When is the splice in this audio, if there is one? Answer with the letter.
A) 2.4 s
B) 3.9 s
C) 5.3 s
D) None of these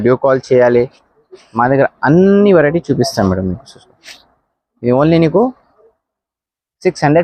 D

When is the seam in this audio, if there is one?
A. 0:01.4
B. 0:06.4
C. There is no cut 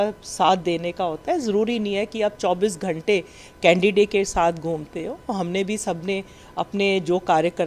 B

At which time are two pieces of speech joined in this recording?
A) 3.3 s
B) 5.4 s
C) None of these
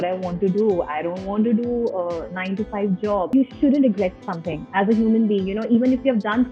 A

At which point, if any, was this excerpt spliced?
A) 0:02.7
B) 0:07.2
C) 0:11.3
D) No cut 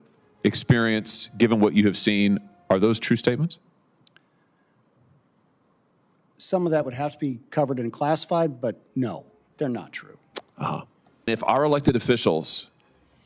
C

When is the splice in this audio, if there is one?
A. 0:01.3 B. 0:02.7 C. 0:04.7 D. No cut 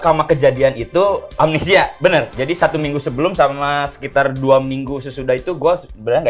A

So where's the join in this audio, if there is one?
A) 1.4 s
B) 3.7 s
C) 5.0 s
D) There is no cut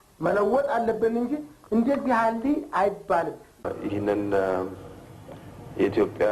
B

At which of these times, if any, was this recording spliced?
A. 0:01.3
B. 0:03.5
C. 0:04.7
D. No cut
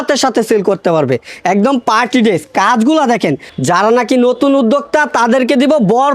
B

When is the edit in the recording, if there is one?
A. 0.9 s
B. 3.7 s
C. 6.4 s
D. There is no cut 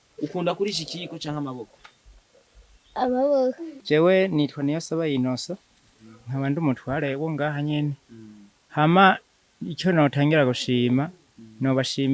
B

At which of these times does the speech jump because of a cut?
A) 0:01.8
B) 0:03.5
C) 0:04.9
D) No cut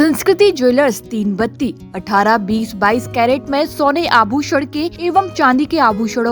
C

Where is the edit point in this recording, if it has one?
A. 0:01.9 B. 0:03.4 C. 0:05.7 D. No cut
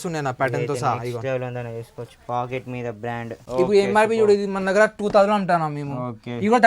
B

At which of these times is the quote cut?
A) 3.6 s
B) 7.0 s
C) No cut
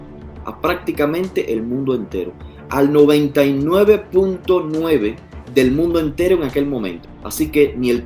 B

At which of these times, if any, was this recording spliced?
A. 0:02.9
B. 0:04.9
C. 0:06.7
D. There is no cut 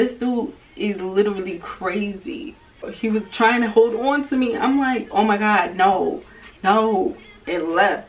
A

